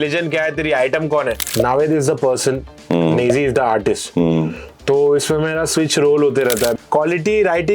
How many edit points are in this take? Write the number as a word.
two